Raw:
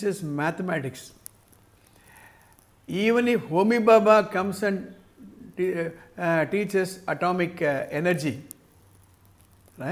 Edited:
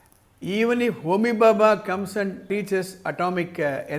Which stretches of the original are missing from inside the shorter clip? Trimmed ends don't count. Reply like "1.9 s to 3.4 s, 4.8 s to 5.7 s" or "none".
4.9 s to 6.5 s